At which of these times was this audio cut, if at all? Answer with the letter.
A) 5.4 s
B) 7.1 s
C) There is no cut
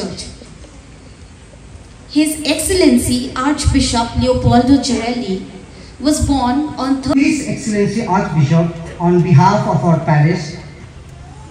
B